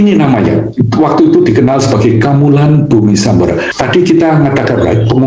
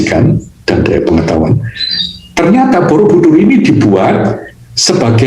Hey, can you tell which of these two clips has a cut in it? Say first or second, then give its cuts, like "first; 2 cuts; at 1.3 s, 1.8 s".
first; 1 cut; at 3.7 s